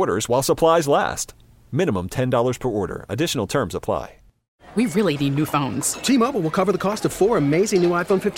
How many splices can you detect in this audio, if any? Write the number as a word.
one